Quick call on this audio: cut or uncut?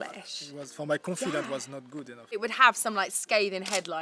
cut